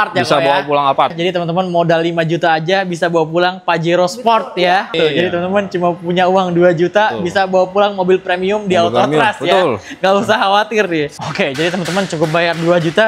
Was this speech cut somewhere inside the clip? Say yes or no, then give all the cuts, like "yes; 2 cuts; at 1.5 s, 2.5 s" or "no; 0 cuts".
yes; 3 cuts; at 1.1 s, 4.9 s, 11.2 s